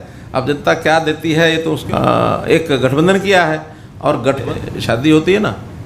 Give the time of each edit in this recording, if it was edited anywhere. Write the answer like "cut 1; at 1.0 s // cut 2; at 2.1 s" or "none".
cut 1; at 1.8 s // cut 2; at 4.4 s